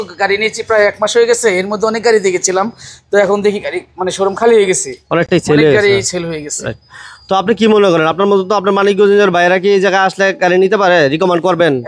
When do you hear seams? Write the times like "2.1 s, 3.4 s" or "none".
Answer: none